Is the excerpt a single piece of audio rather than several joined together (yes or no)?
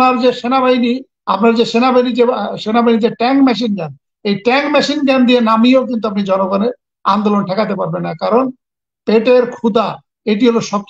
yes